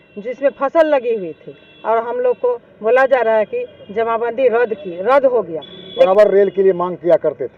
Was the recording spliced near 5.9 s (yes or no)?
yes